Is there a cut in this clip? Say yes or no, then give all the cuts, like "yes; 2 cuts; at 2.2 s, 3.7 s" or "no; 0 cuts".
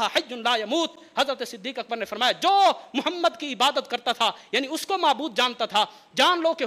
no; 0 cuts